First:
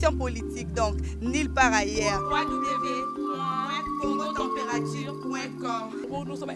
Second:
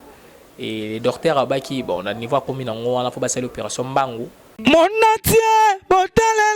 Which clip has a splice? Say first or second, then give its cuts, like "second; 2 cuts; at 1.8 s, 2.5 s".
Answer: second; 1 cut; at 4.5 s